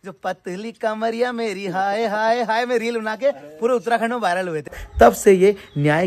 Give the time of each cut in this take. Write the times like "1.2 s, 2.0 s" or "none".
4.8 s

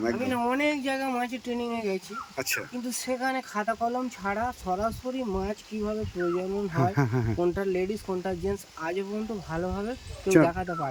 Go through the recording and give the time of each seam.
none

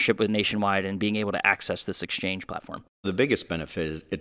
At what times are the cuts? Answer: 3.1 s

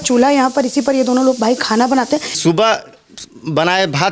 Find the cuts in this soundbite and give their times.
2.4 s

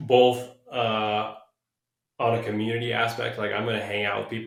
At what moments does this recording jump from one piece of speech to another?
none

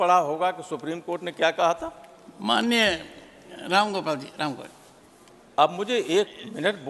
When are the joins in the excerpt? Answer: none

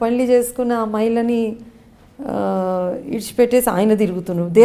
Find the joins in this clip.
none

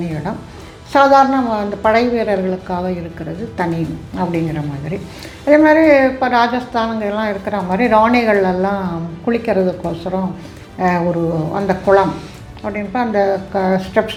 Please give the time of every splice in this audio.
none

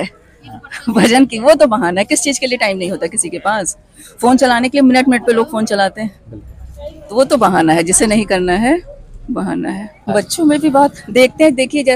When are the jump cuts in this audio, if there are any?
9.9 s

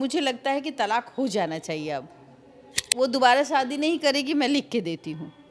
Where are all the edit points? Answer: 2.8 s

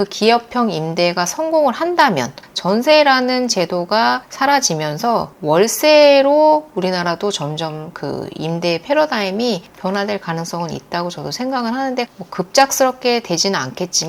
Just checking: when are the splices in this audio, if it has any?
2.5 s, 4.3 s, 12.1 s

